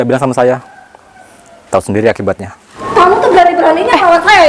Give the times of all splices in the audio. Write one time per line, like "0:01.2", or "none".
0:02.8